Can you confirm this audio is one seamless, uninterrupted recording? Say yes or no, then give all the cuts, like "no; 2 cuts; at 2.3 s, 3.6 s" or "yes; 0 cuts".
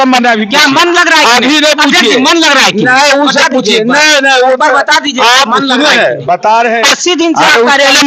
yes; 0 cuts